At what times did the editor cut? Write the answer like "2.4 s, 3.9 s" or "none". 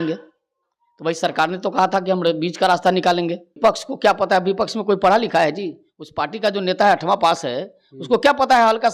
3.6 s